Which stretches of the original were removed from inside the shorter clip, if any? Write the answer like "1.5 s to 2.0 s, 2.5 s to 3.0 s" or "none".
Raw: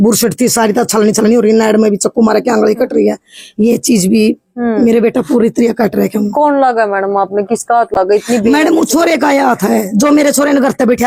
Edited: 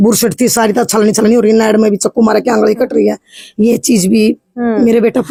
none